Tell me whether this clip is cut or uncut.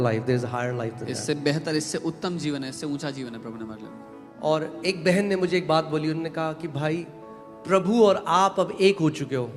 cut